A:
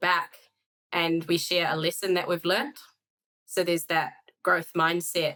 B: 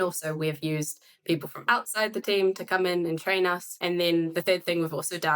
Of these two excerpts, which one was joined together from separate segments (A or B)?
B